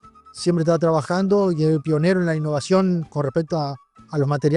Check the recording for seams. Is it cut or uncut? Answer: uncut